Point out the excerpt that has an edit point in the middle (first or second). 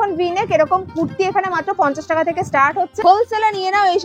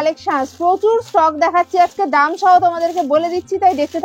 first